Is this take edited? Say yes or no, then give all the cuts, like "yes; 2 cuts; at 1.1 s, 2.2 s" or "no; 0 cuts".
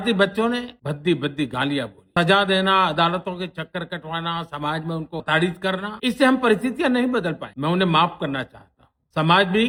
no; 0 cuts